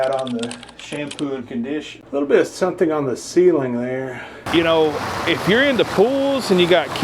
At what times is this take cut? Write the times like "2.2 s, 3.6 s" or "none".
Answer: 2.0 s, 4.4 s